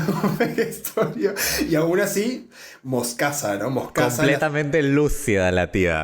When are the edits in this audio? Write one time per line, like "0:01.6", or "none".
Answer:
0:04.2